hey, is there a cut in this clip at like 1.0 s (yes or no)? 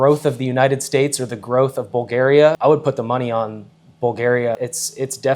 no